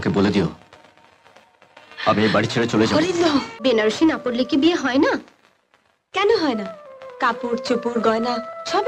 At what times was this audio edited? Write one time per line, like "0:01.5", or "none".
0:03.5